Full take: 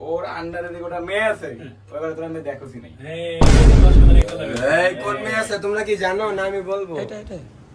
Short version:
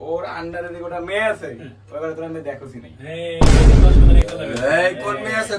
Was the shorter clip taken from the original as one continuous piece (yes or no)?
yes